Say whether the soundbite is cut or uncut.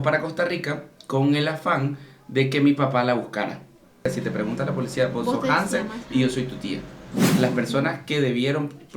cut